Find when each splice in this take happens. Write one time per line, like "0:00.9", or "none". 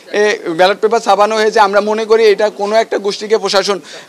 none